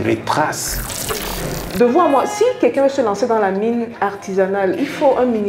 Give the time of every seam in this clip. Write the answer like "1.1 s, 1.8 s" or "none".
1.2 s